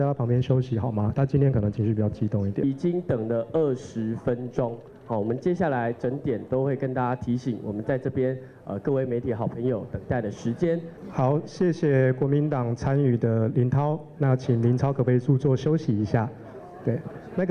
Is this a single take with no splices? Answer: no; 2 cuts; at 2.6 s, 11.0 s

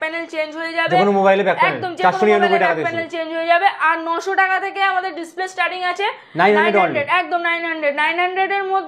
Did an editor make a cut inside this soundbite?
no; 0 cuts

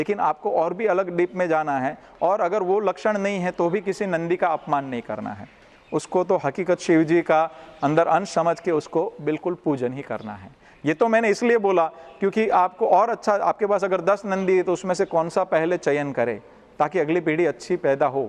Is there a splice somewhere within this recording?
no; 0 cuts

